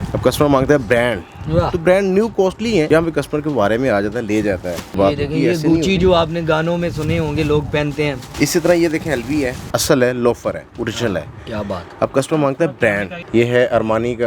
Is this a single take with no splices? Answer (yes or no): no